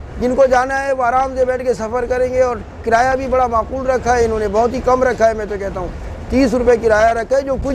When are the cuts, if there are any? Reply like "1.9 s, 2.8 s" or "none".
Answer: none